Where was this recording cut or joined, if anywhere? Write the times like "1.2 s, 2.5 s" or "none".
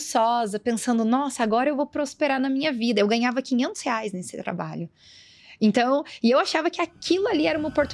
none